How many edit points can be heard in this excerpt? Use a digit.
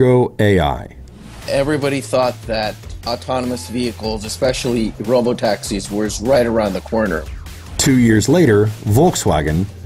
0